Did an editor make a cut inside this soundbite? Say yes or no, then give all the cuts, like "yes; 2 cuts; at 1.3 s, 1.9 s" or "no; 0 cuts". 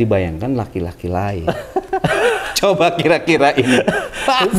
yes; 1 cut; at 2.0 s